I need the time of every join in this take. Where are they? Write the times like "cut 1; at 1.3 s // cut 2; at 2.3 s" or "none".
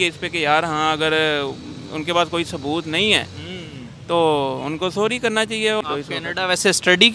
cut 1; at 5.8 s

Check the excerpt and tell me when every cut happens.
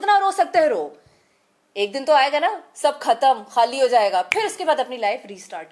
none

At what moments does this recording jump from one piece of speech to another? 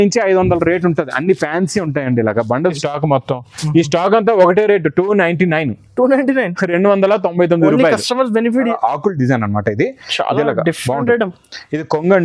cut 1; at 2.8 s // cut 2; at 8.7 s

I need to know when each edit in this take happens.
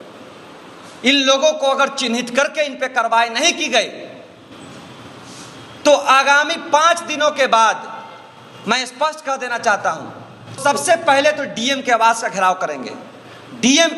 cut 1; at 10.6 s

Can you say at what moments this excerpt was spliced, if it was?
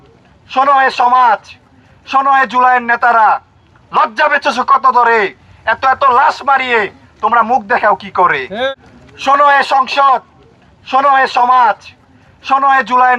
cut 1; at 8.7 s

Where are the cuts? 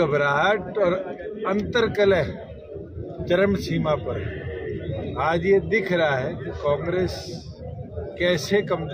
none

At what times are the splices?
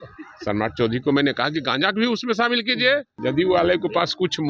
cut 1; at 3.1 s

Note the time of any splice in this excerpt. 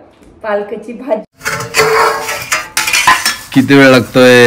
cut 1; at 1.3 s

